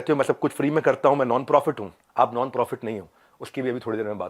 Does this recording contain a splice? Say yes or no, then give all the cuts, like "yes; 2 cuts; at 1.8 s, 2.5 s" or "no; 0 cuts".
yes; 1 cut; at 1.9 s